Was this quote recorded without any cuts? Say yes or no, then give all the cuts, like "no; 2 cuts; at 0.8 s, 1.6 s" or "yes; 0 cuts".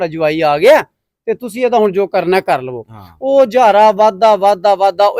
yes; 0 cuts